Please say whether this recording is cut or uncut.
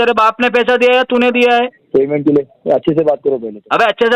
uncut